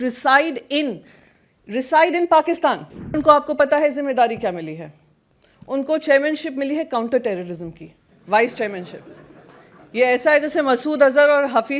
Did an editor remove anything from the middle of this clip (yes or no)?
yes